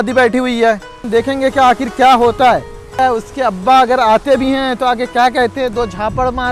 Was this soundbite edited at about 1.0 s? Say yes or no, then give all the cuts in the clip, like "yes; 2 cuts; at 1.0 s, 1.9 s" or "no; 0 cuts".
yes; 2 cuts; at 1.0 s, 3.0 s